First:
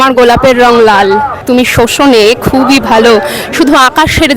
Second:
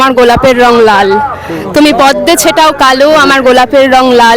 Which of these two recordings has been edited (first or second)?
first